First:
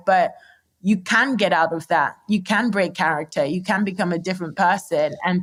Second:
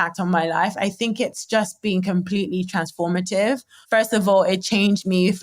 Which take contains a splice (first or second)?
second